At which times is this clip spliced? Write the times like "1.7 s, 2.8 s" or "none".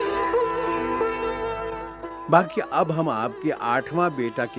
1.9 s